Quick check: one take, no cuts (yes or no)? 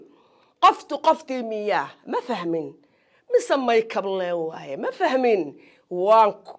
yes